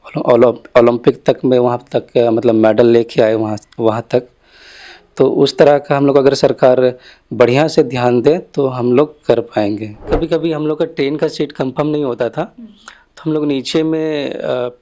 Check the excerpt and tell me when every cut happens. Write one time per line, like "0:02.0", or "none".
0:10.0